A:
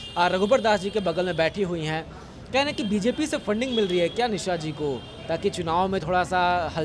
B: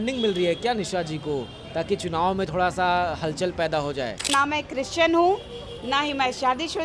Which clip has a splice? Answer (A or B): B